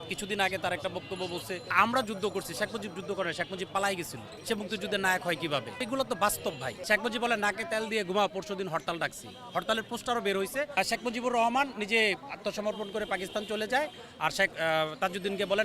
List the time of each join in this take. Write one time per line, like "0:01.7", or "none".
0:01.7
0:04.3
0:05.7
0:06.7
0:10.7